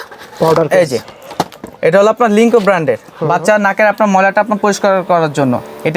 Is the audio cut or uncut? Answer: cut